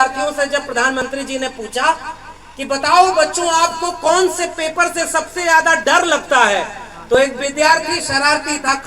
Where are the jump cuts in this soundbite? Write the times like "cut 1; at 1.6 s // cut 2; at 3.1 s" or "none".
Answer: none

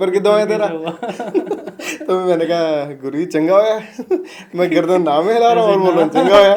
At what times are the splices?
none

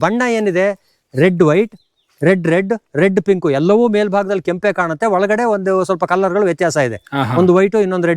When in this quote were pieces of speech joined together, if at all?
none

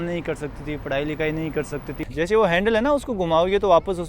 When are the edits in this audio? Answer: cut 1; at 2.0 s

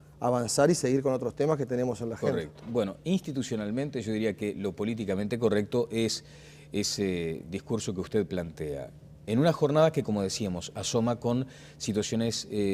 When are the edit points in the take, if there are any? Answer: cut 1; at 3.1 s

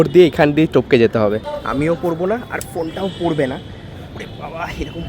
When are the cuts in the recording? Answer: cut 1; at 1.5 s

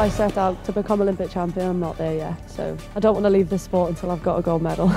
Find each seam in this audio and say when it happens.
cut 1; at 2.9 s

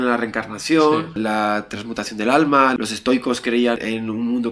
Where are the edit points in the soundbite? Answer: cut 1; at 1.2 s // cut 2; at 2.8 s // cut 3; at 3.8 s

